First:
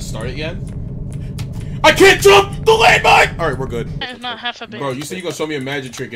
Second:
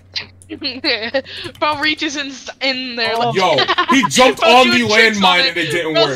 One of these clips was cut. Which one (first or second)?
first